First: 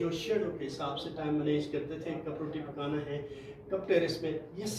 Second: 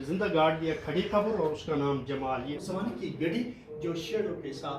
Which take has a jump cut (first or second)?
second